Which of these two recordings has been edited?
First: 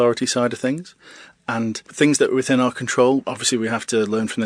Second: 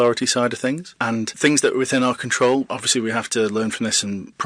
second; 1 cut; at 1.2 s

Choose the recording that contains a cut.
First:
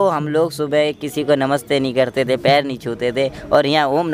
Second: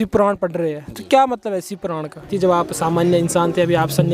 second; 1 cut; at 2.3 s

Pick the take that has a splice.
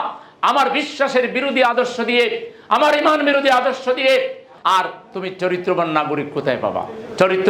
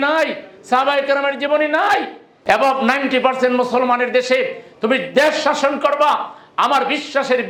first; 1 cut; at 4.5 s

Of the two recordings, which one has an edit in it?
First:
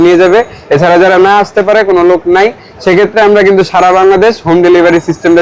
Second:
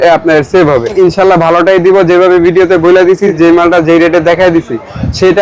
second; 2 cuts; at 0.9 s, 3.3 s

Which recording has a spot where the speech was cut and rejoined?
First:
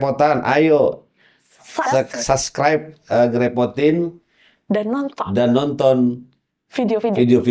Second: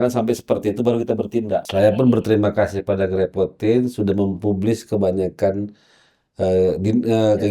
second; 1 cut; at 1.7 s

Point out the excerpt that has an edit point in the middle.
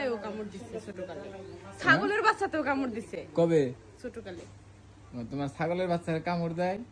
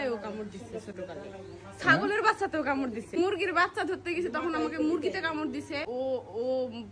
second; 2 cuts; at 3.2 s, 5.8 s

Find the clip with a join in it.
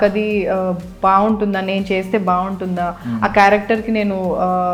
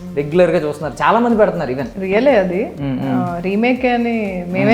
second; 1 cut; at 1.9 s

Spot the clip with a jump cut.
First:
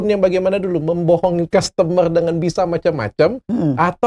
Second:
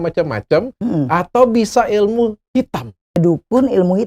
second; 1 cut; at 3.2 s

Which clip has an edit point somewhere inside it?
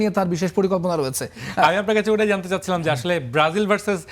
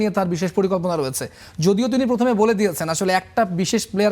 first; 1 cut; at 1.4 s

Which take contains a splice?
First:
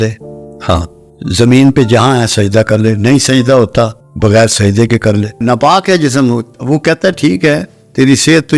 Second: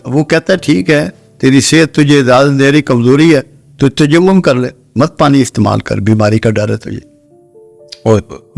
first; 3 cuts; at 1.0 s, 4.0 s, 5.4 s

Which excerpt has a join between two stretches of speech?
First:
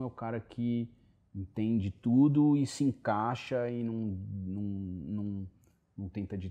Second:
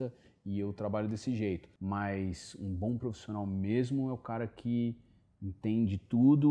second; 1 cut; at 1.7 s

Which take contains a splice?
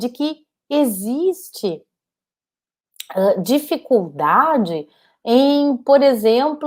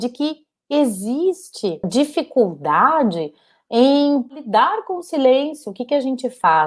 second; 2 cuts; at 1.9 s, 4.3 s

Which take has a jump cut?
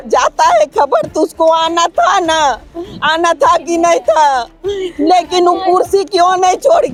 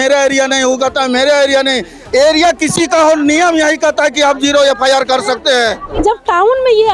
second; 1 cut; at 5.9 s

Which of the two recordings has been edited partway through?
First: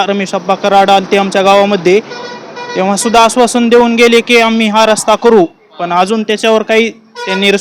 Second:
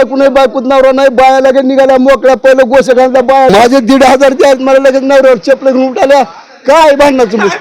second; 1 cut; at 3.5 s

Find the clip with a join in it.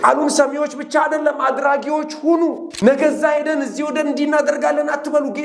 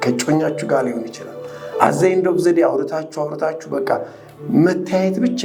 first; 1 cut; at 2.7 s

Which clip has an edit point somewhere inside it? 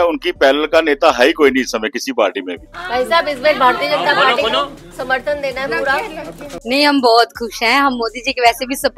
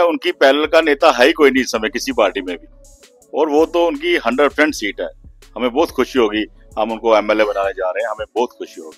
first; 2 cuts; at 2.8 s, 6.6 s

